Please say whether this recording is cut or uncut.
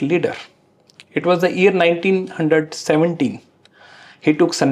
uncut